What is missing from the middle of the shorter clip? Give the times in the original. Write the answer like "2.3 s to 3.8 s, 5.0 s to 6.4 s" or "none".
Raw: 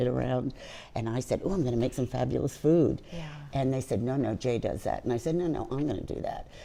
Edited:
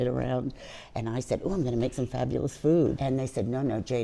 3.0 s to 3.5 s

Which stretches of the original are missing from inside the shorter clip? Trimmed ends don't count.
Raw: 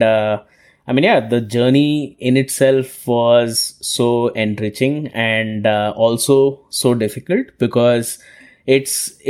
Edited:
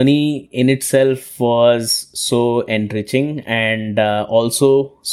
none

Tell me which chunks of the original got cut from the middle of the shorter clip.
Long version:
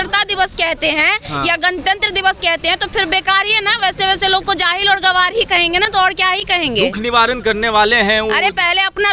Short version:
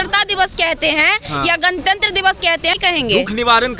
2.8 s to 6.4 s

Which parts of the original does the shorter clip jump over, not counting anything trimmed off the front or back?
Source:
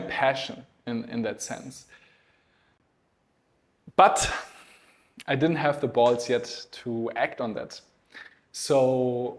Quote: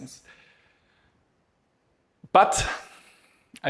none

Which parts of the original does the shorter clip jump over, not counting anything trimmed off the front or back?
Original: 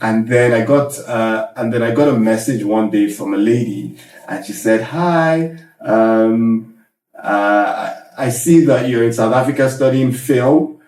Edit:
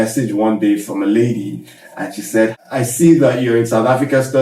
4.9 s to 8.0 s

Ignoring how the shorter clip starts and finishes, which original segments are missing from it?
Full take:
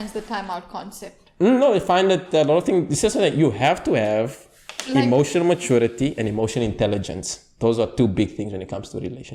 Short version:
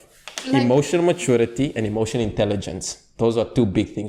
none

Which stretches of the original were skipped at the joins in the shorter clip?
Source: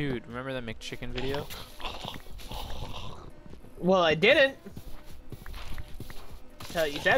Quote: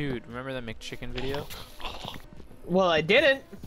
2.3 s to 3.5 s

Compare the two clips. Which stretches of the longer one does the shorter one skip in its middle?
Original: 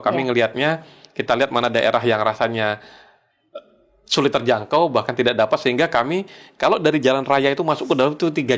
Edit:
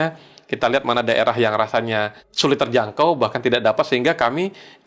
2.9 s to 4.0 s

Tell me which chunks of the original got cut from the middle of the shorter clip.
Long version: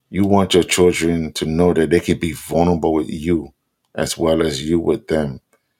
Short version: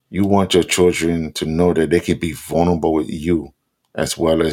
none

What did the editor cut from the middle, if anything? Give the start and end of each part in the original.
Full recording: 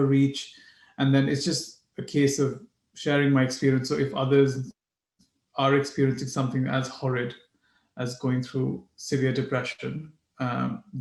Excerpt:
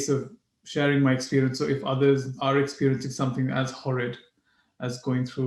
4.6 s to 5.5 s

